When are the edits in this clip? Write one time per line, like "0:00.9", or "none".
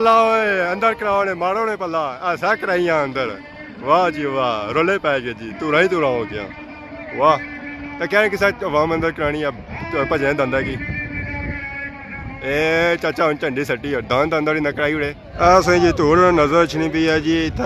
none